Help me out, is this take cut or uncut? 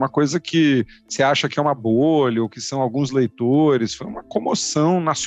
uncut